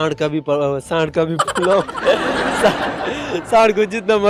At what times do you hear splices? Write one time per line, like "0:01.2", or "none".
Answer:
none